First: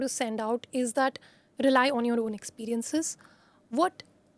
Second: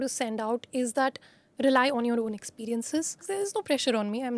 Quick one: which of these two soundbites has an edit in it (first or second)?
second